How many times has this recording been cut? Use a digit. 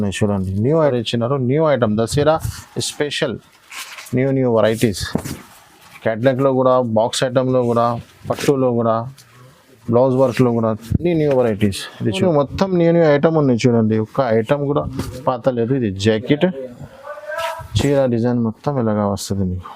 2